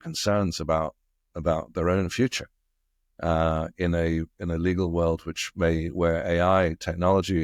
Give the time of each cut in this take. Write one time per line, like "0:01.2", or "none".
none